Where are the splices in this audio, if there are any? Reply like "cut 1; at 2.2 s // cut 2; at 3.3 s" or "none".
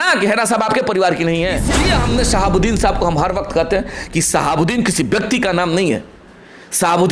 cut 1; at 1.7 s

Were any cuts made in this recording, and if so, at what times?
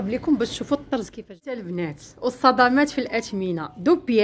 cut 1; at 1.5 s

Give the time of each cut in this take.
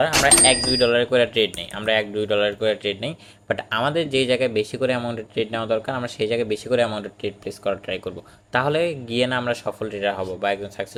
none

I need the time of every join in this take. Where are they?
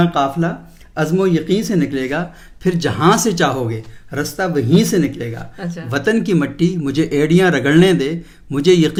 none

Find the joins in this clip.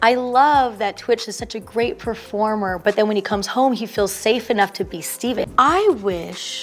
cut 1; at 5.5 s

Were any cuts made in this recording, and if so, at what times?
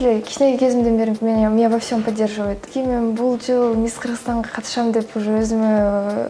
cut 1; at 2.7 s

